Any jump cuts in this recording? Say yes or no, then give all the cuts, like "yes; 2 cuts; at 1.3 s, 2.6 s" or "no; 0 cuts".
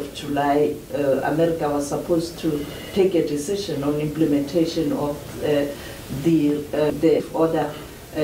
yes; 1 cut; at 7.2 s